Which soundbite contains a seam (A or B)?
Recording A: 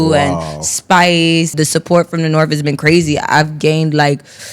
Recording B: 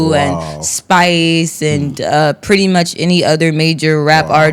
A